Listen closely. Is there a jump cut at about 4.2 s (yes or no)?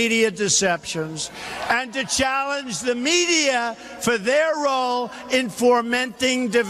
no